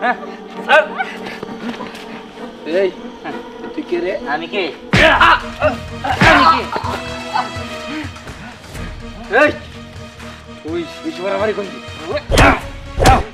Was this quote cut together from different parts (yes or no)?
no